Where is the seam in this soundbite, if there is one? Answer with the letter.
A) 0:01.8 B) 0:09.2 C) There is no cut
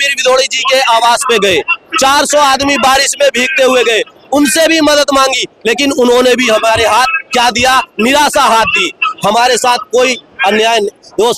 C